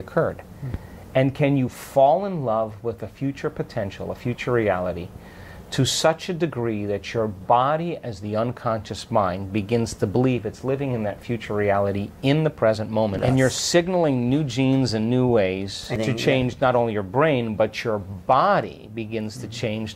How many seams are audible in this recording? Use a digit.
2